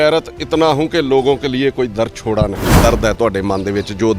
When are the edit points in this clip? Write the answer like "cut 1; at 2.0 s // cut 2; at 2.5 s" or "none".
cut 1; at 2.8 s

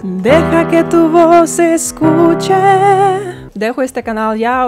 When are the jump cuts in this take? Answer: cut 1; at 3.4 s

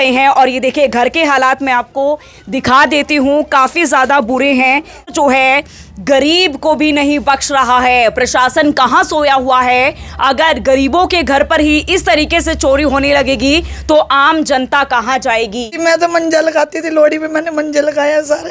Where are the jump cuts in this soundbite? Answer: cut 1; at 5.1 s // cut 2; at 15.8 s

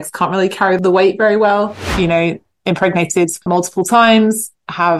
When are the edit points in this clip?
cut 1; at 0.8 s // cut 2; at 1.8 s // cut 3; at 3.4 s

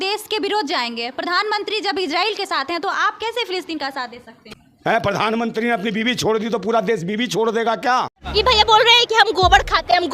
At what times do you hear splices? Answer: cut 1; at 4.6 s // cut 2; at 8.2 s

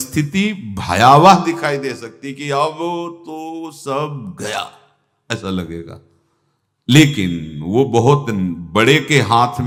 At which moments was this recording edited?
none

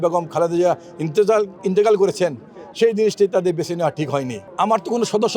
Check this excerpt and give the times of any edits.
cut 1; at 4.4 s

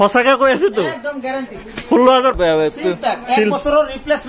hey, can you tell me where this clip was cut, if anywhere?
cut 1; at 2.4 s

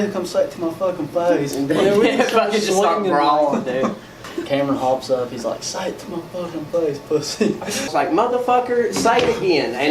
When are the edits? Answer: cut 1; at 4.3 s // cut 2; at 7.9 s

